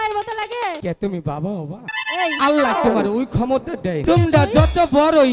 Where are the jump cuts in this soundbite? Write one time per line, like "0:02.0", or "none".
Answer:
0:00.8
0:02.0
0:04.0